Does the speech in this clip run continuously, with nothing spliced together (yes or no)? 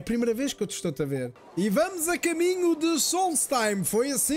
no